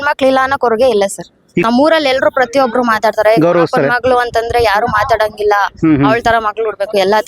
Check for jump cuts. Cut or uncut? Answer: cut